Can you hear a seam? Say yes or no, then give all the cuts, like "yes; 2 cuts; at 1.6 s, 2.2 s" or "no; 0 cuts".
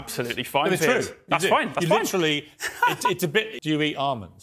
yes; 1 cut; at 3.5 s